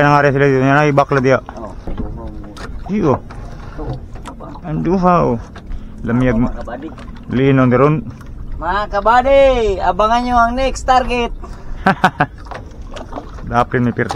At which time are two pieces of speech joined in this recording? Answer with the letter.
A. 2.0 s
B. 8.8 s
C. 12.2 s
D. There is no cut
A